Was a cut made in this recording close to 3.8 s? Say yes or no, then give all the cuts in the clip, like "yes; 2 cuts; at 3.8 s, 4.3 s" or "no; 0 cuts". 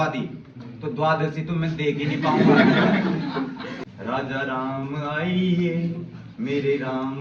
yes; 1 cut; at 3.8 s